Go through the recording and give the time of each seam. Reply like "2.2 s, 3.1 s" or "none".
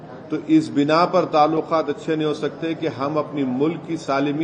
none